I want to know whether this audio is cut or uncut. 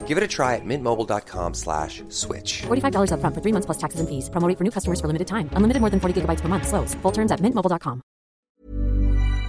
cut